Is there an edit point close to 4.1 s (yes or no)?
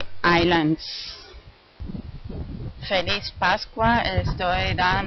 no